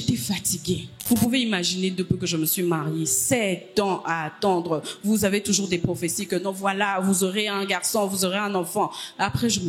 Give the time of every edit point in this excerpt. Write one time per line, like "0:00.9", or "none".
0:00.9